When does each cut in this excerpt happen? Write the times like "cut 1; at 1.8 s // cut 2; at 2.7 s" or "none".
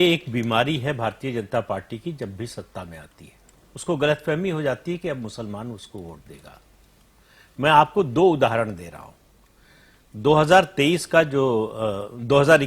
none